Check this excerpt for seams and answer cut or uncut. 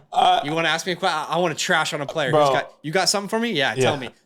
uncut